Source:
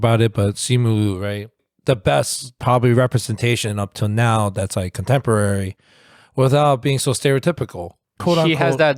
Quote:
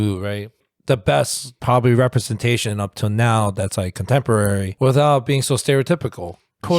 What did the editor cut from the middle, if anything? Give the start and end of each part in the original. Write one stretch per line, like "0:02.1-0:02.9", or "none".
0:05.7-0:06.2